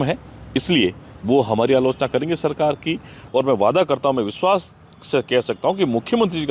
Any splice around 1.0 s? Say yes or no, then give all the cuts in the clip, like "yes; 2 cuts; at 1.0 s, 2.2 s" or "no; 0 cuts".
no; 1 cut; at 3.1 s